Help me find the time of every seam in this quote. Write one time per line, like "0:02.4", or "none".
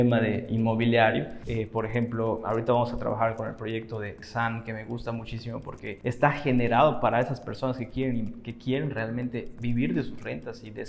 0:01.4
0:04.2
0:06.0